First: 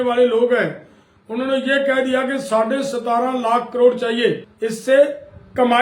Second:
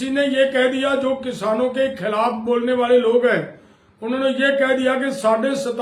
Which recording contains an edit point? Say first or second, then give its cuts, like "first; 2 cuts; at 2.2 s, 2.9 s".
first; 1 cut; at 4.5 s